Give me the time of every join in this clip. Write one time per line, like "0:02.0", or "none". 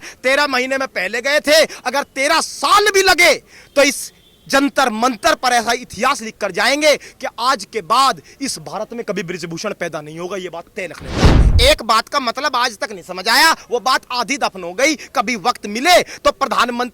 0:11.3